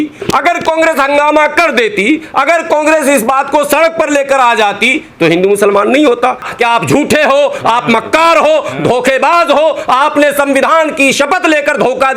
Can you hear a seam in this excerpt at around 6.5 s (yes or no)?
yes